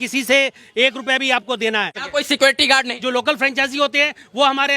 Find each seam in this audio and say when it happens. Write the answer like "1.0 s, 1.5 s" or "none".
2.0 s, 3.0 s